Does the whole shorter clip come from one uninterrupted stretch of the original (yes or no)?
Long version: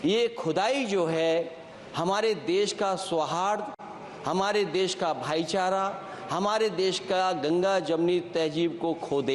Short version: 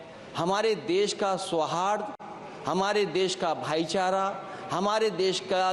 yes